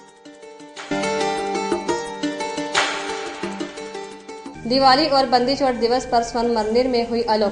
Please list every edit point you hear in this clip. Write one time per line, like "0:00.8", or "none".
0:00.9